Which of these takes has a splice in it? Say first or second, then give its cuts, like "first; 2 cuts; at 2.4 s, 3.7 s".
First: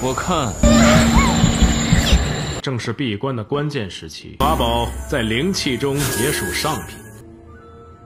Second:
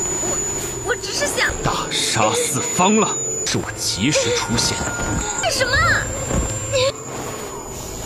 first; 1 cut; at 2.6 s